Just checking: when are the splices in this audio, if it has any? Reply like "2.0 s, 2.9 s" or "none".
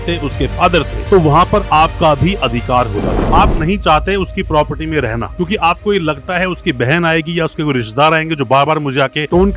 3.2 s